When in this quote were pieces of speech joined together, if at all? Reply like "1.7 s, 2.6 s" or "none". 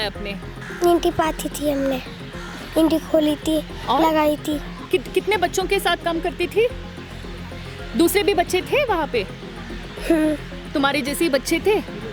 none